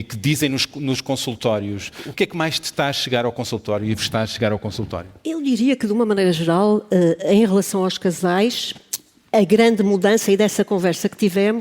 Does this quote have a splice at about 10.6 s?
no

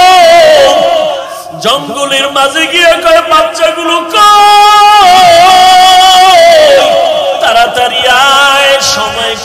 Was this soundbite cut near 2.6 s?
no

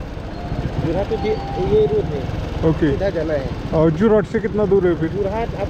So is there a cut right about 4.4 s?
no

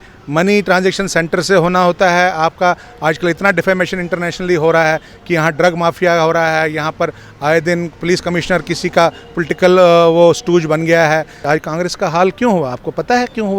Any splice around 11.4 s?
yes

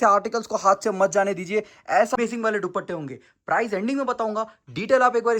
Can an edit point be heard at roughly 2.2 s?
yes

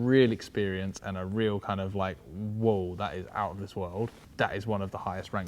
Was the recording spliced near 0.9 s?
no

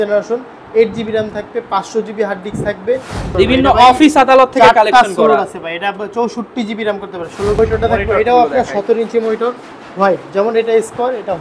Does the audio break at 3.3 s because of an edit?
yes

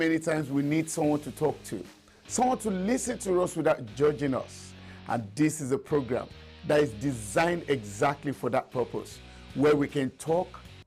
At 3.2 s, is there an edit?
no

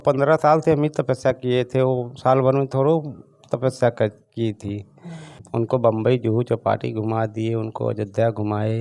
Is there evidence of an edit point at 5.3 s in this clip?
yes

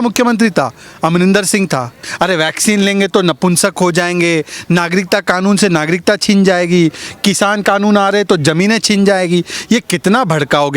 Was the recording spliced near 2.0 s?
yes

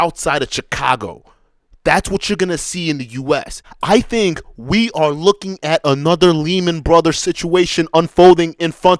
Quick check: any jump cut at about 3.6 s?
yes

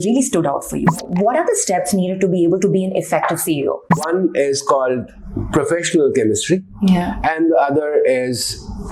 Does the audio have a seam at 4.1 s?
yes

